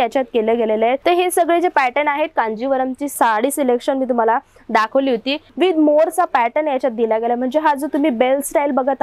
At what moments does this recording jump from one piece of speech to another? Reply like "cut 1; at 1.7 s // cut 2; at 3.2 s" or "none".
cut 1; at 1.0 s // cut 2; at 3.1 s // cut 3; at 5.4 s